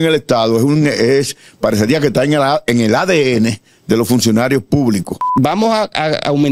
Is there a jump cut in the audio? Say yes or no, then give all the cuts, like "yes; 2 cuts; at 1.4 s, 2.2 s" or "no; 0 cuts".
yes; 1 cut; at 5.3 s